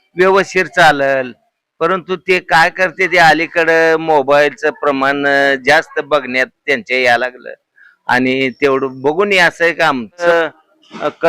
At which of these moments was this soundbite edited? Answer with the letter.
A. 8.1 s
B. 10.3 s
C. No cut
B